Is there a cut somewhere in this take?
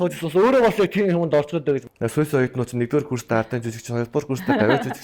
yes; 1 cut; at 1.8 s

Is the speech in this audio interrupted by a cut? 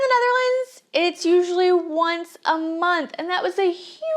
no; 0 cuts

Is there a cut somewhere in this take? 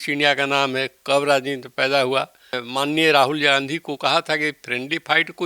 yes; 1 cut; at 2.6 s

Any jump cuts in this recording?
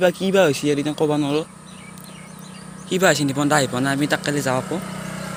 no; 0 cuts

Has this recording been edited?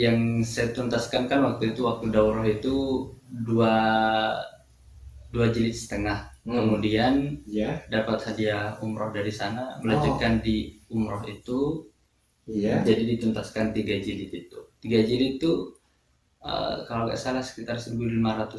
no; 0 cuts

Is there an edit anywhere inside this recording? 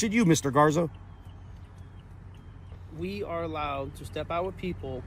no; 0 cuts

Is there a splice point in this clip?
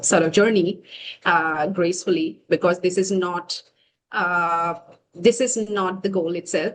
no; 0 cuts

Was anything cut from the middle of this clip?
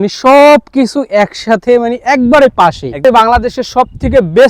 yes; 1 cut; at 2.9 s

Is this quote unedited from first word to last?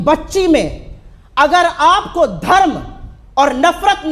yes; 0 cuts

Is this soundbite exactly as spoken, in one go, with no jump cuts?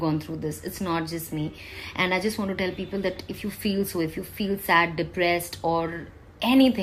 yes; 0 cuts

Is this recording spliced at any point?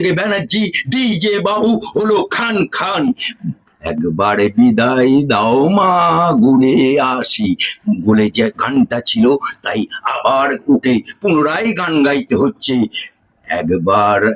yes; 1 cut; at 3.1 s

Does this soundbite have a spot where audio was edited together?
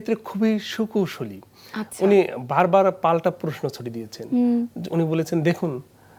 no; 0 cuts

